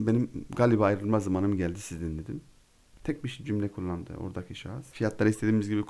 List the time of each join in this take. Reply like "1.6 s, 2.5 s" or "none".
4.9 s